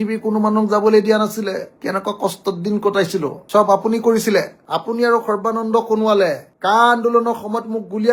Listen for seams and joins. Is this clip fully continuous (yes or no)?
yes